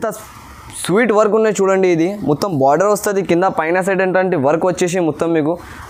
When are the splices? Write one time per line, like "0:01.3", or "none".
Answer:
none